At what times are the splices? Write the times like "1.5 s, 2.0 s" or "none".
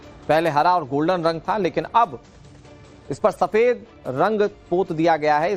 4.6 s